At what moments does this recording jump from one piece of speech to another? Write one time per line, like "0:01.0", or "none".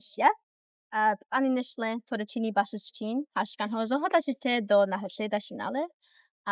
none